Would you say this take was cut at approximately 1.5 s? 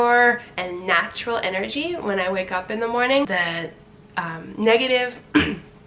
no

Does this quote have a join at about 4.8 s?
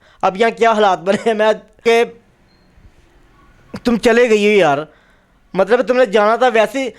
no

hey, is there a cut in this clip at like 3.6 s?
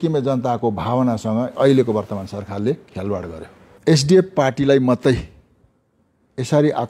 yes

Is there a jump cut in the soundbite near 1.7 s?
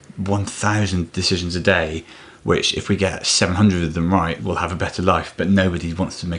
no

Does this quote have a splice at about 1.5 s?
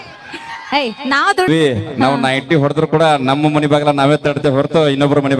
yes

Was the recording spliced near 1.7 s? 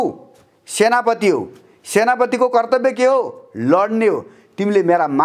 no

